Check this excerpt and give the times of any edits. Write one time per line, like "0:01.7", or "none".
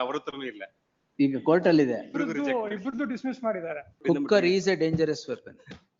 0:04.0